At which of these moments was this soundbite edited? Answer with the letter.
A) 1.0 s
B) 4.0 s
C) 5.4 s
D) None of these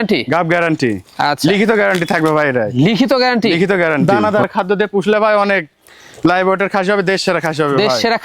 B